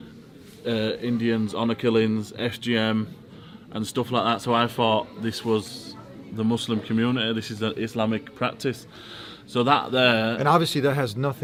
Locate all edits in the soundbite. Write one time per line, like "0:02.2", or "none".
none

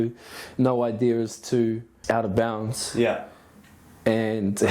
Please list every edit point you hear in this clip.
0:01.9

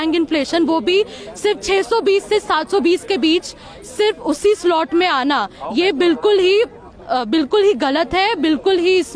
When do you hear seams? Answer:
none

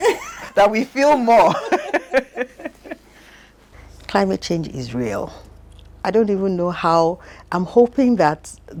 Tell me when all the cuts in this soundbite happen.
none

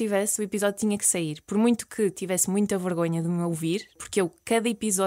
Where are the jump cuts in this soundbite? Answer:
0:04.0

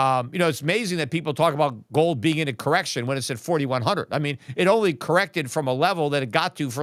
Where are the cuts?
none

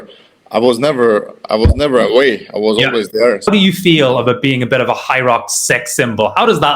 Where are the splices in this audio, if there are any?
0:03.5

